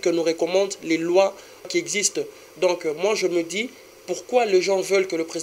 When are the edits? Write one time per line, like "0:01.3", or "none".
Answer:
0:01.7